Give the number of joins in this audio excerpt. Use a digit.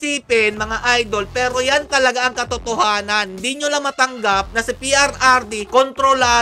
0